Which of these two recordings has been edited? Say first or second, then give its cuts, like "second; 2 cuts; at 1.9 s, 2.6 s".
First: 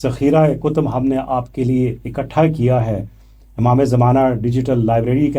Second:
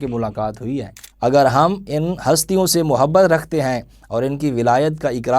second; 1 cut; at 1.0 s